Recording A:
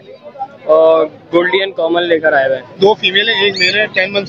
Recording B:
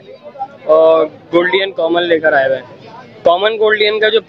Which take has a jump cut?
A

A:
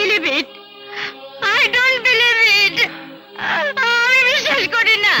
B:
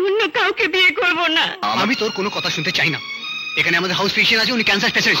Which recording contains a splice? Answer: B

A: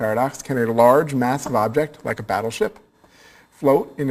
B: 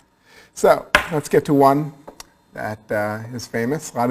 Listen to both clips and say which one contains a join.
B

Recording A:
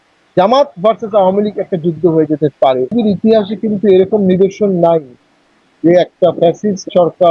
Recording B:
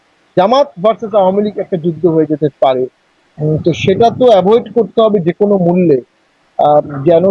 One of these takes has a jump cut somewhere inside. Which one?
A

